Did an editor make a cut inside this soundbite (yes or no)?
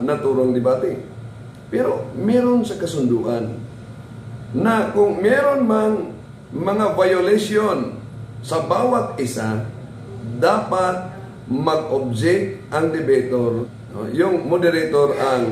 yes